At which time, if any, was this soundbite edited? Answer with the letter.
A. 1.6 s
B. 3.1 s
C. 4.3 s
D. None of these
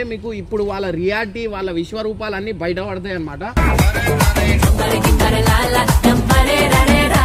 D